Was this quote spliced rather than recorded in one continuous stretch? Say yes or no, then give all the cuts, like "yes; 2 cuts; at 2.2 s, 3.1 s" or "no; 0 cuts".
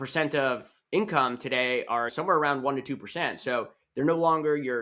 yes; 1 cut; at 2.1 s